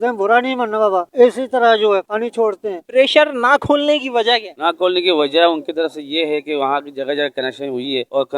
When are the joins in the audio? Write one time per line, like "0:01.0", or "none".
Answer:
0:02.7